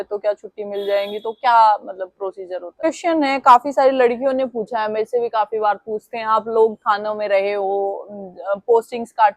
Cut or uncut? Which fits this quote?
cut